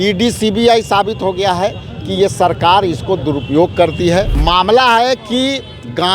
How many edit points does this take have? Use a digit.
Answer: 1